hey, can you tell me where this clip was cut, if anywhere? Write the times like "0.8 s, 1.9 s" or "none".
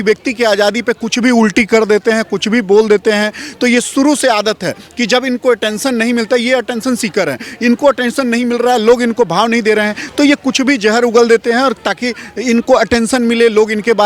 none